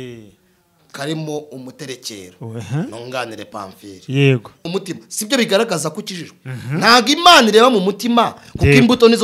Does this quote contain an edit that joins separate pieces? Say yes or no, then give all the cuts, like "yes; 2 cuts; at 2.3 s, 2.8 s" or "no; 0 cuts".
yes; 1 cut; at 4.6 s